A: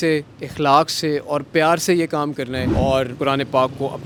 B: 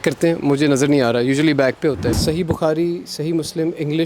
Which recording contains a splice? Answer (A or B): B